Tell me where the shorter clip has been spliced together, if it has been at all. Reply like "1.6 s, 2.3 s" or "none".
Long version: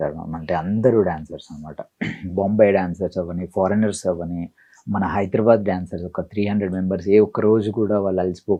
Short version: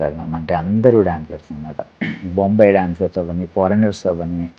none